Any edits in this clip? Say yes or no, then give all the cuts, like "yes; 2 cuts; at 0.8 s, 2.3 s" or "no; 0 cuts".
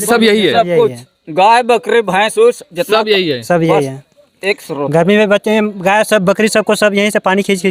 no; 0 cuts